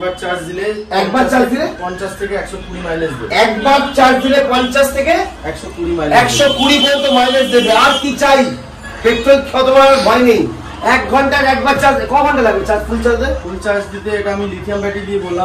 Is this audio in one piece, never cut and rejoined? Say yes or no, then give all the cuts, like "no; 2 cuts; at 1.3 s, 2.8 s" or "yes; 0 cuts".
yes; 0 cuts